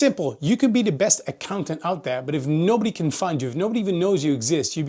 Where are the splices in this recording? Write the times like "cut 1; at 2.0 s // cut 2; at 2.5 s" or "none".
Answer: none